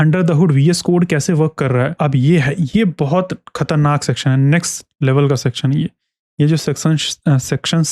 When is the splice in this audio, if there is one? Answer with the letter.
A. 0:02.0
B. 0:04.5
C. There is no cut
A